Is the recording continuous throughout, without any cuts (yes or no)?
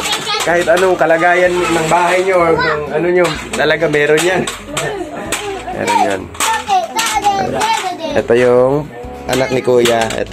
yes